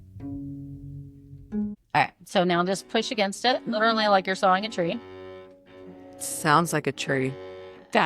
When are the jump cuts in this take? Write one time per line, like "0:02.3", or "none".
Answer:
0:01.7